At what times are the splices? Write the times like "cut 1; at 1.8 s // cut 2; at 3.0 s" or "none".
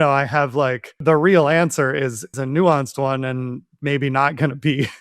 cut 1; at 1.0 s // cut 2; at 2.3 s